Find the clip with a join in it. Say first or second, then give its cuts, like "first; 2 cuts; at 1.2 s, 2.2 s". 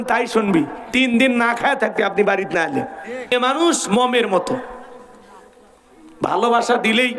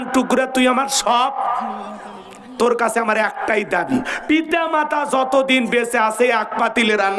first; 1 cut; at 3.3 s